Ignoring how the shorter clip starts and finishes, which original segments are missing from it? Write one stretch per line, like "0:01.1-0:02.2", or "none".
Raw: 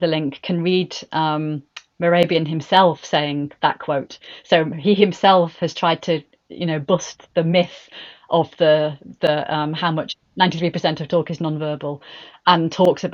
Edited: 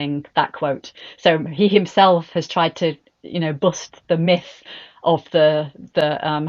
none